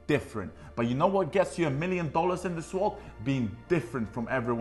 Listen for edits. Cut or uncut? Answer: uncut